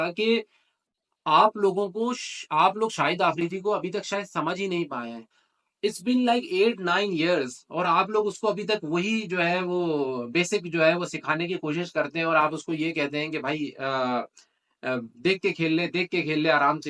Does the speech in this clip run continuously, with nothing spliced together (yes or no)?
yes